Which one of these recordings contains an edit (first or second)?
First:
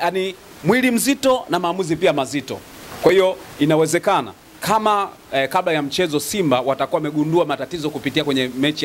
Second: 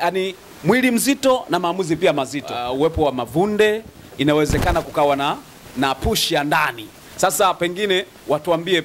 second